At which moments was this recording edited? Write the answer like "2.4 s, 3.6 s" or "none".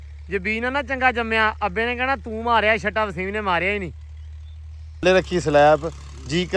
5.0 s